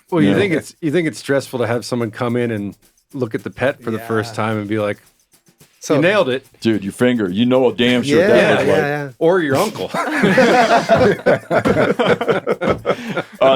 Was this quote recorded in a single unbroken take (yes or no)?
yes